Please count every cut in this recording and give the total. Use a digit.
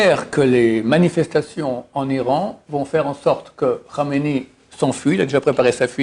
0